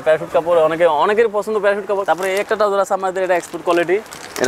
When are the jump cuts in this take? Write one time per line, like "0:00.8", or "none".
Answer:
0:02.0